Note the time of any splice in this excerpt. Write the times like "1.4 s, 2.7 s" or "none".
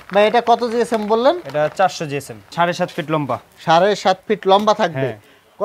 2.4 s

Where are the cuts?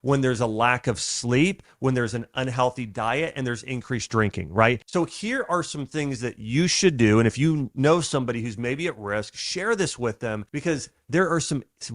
4.8 s, 10.5 s

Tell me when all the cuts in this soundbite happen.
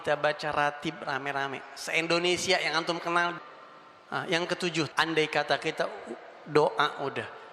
3.4 s

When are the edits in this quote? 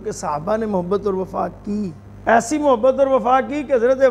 2.1 s

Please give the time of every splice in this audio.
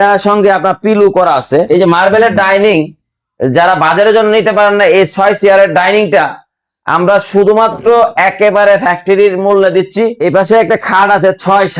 1.7 s, 10.2 s

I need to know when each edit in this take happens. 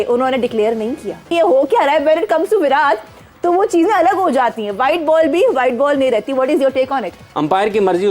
1.3 s, 7.2 s

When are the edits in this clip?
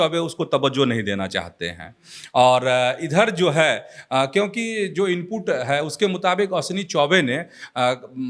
none

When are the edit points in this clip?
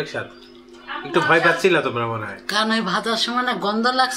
none

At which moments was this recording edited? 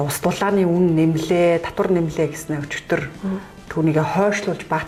none

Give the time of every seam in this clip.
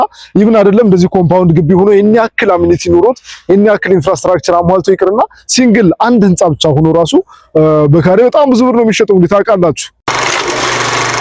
10.0 s

